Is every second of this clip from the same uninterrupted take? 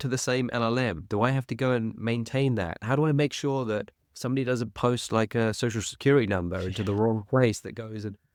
yes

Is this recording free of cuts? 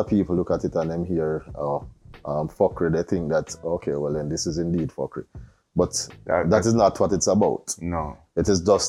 yes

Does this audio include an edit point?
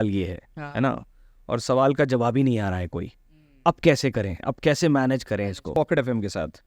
yes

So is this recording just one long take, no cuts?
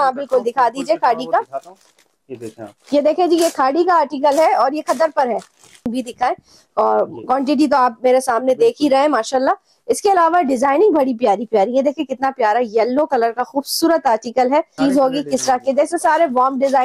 no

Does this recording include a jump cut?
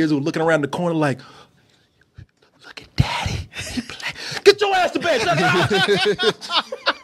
no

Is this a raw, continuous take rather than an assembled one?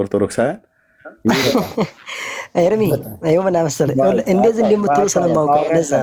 yes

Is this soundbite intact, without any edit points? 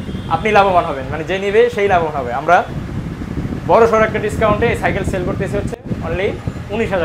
yes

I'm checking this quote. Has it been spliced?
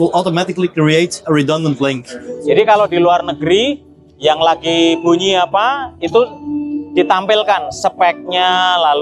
yes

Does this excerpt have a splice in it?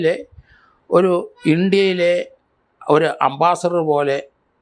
no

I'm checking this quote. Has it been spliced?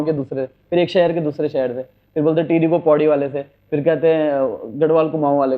no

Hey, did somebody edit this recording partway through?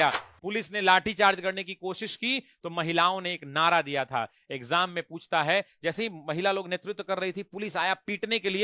no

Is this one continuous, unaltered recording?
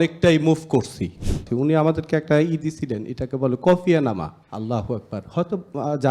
no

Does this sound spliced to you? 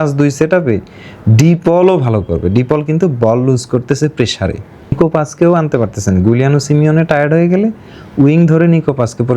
yes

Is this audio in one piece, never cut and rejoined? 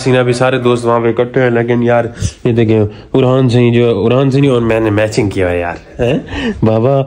yes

